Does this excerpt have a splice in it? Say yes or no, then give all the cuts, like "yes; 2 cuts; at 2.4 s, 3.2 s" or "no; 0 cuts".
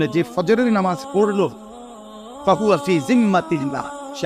no; 0 cuts